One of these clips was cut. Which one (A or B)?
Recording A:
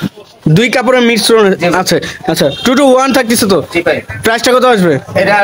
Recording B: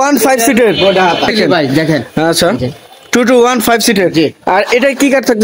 B